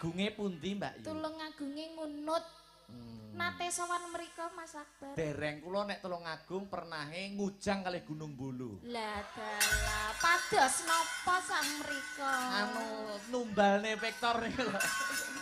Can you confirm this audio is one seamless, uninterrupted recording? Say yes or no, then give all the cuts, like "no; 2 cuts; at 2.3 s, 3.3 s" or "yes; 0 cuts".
yes; 0 cuts